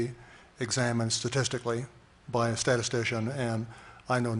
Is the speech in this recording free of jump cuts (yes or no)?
no